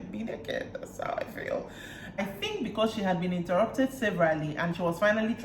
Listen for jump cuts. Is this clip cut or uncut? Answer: cut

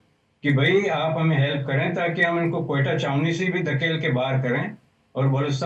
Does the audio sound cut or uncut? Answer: uncut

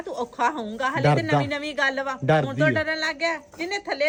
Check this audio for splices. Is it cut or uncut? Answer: uncut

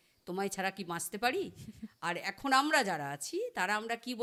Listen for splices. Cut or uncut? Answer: uncut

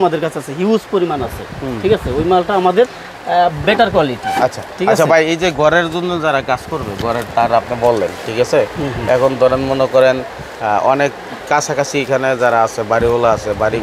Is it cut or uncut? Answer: uncut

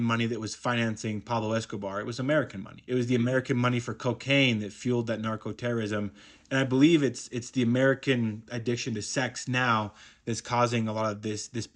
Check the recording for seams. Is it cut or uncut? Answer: uncut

